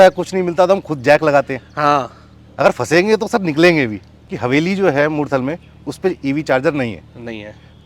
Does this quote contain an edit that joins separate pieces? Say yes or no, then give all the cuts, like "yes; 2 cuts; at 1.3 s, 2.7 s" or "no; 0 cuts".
yes; 1 cut; at 4.2 s